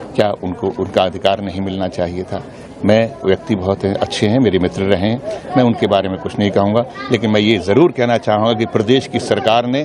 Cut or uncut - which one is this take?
uncut